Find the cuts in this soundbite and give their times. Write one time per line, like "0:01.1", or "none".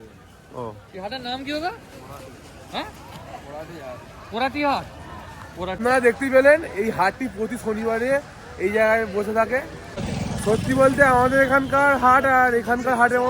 0:05.8
0:10.0